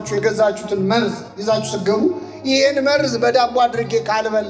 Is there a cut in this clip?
no; 0 cuts

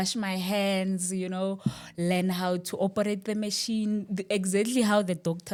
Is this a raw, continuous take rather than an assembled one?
yes; 0 cuts

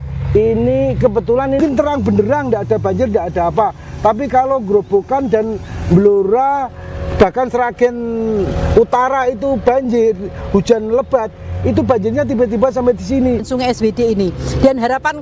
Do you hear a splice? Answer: yes; 2 cuts; at 1.6 s, 13.5 s

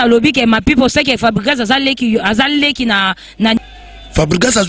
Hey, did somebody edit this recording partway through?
yes; 1 cut; at 3.6 s

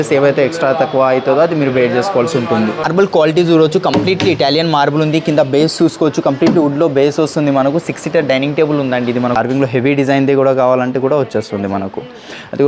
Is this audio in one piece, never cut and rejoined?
no; 2 cuts; at 2.9 s, 9.4 s

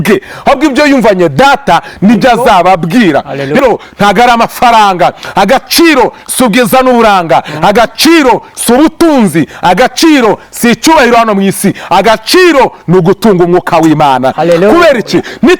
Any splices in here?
yes; 1 cut; at 3.6 s

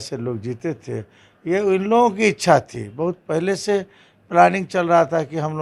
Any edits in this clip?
no; 0 cuts

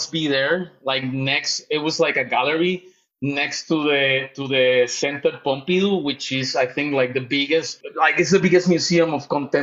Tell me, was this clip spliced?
yes; 1 cut; at 7.8 s

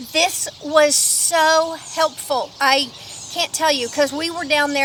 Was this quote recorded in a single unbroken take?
yes; 0 cuts

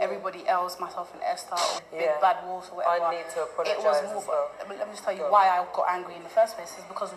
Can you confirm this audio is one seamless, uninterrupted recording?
no; 1 cut; at 1.8 s

